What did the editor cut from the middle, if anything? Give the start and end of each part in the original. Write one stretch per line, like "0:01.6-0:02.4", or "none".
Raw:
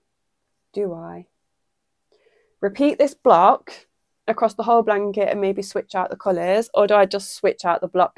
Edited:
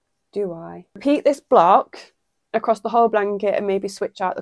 0:01.4-0:02.7